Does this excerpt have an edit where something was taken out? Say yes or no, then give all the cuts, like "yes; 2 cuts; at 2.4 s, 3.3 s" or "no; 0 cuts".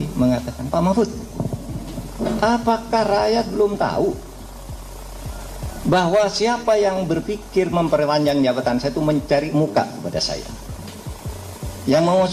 no; 0 cuts